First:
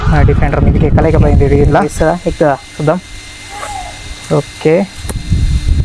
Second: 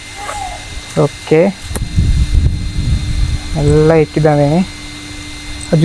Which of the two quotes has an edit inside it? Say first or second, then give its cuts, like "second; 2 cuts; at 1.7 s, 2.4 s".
first; 1 cut; at 1.9 s